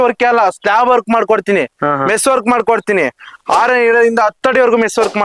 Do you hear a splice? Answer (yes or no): no